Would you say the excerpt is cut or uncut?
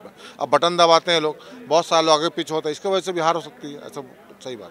uncut